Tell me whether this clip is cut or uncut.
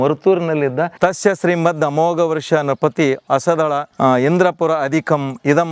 cut